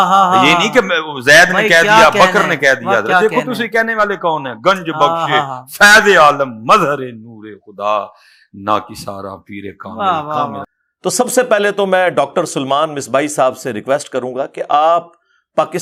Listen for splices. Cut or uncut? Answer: uncut